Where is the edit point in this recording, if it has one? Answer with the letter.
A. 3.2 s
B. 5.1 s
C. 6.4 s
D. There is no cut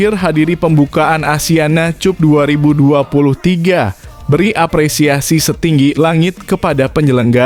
D